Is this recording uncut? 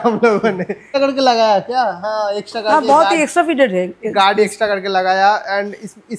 no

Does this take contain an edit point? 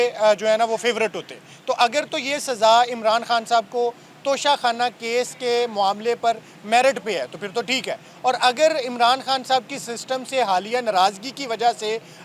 no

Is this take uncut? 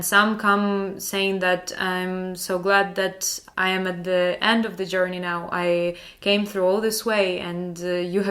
no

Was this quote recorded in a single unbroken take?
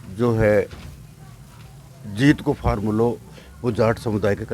yes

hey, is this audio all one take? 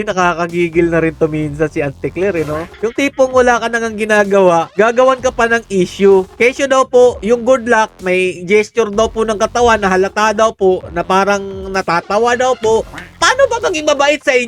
yes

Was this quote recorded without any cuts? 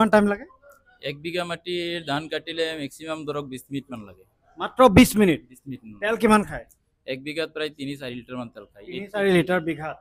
yes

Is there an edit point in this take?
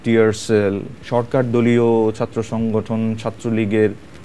yes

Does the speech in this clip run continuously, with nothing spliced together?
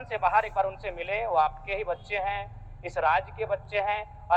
yes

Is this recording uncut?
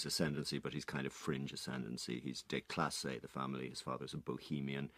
no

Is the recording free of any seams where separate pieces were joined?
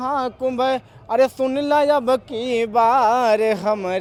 yes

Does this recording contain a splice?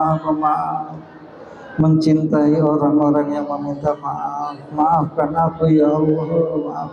no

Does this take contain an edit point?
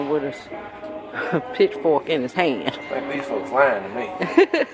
no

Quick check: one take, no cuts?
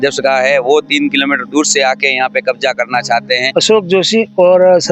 no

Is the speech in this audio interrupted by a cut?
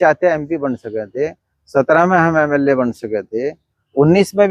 no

